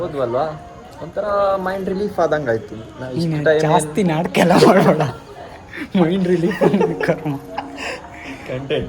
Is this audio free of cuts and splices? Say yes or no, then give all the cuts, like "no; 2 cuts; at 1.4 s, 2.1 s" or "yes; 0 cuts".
no; 1 cut; at 5.8 s